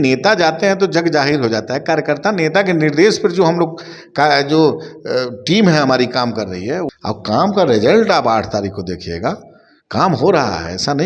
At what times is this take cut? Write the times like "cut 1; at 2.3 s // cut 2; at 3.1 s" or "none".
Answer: cut 1; at 6.9 s